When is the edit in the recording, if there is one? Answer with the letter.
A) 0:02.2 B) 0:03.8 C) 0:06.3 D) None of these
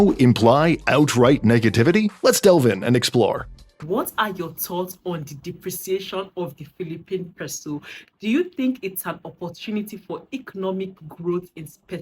B